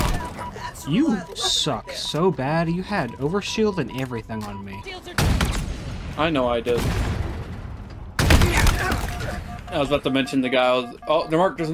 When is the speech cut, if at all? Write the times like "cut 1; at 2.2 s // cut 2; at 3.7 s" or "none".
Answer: cut 1; at 5.0 s